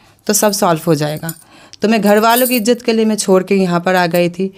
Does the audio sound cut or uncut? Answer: uncut